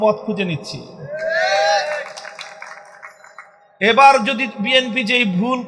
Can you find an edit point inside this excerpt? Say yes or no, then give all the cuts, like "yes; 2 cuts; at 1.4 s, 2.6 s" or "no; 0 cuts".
no; 0 cuts